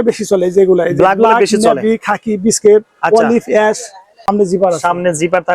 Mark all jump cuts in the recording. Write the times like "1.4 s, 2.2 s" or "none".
4.3 s